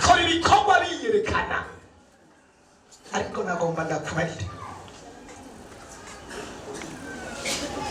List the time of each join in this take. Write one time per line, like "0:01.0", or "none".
none

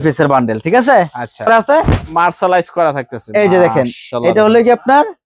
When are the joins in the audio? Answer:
0:01.5

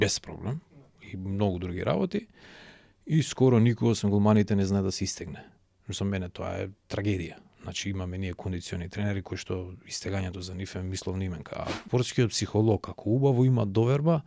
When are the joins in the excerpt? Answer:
0:11.8

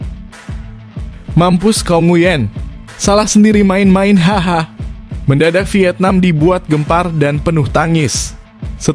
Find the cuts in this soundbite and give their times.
0:01.3

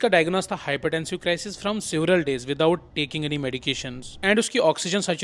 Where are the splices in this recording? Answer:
none

